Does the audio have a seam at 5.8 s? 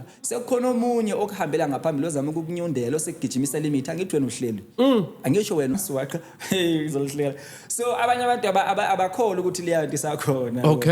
yes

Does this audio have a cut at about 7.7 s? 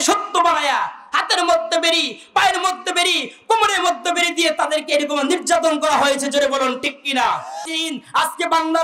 yes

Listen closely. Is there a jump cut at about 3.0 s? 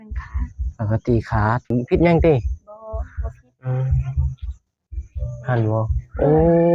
no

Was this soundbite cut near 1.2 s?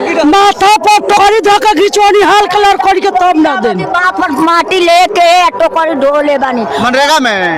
yes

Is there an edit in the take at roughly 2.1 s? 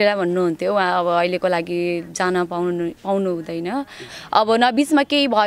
no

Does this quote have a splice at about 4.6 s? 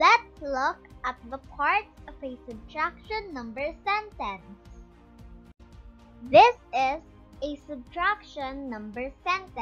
yes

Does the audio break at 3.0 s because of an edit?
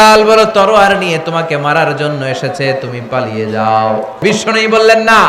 no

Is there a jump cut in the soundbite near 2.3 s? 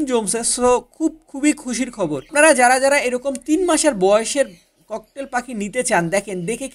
yes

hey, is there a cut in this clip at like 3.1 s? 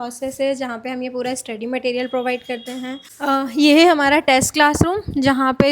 yes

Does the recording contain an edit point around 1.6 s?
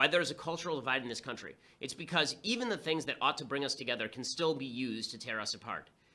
no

